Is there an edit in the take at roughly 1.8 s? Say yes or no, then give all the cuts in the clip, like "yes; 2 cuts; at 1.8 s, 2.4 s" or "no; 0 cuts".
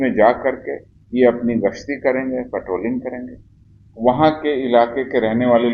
no; 0 cuts